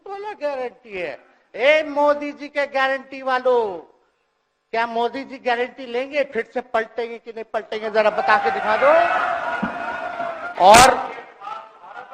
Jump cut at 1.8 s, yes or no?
no